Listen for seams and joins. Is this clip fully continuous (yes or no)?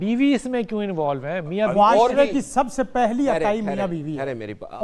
yes